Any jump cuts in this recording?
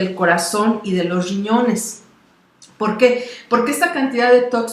no; 0 cuts

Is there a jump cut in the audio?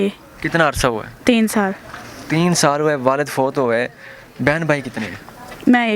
no; 0 cuts

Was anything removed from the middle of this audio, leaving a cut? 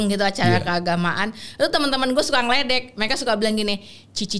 no; 0 cuts

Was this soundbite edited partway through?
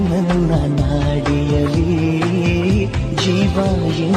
no; 0 cuts

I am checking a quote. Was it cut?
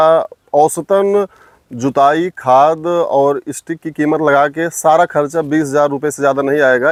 no; 0 cuts

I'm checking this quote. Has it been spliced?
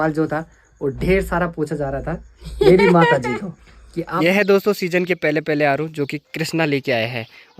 yes; 1 cut; at 4.0 s

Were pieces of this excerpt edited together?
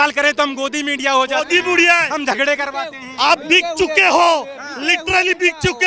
no; 0 cuts

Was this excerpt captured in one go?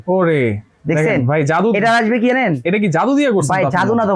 yes; 0 cuts

